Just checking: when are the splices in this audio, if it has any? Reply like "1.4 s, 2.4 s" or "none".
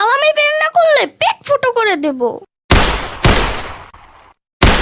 2.5 s

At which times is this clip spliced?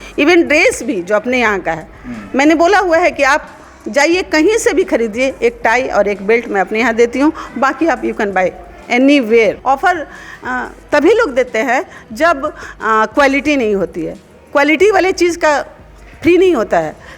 9.6 s

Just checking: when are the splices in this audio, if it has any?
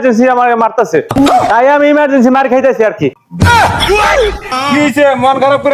4.5 s

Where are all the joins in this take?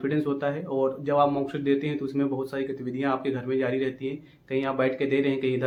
none

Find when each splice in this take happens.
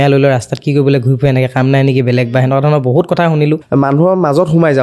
3.6 s

